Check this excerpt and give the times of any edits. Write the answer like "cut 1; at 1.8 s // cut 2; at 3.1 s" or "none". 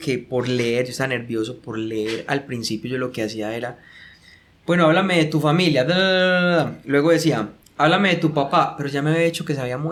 none

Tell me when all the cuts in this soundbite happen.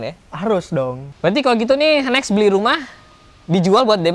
cut 1; at 1.1 s

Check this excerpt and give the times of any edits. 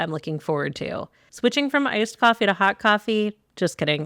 cut 1; at 1.3 s

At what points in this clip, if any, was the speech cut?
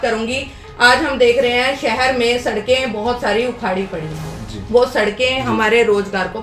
none

